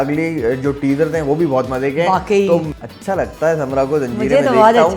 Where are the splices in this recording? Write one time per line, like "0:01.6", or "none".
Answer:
0:02.7